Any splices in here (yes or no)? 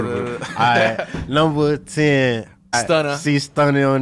yes